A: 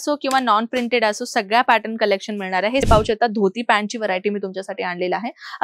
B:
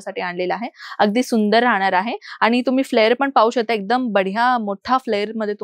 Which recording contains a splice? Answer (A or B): A